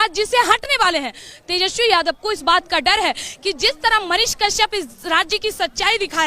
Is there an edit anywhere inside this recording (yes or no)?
no